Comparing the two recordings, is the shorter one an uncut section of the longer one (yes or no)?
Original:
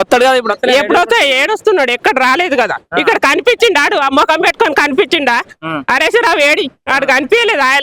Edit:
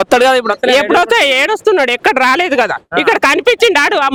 yes